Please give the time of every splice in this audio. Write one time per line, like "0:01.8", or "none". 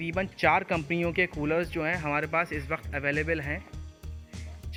none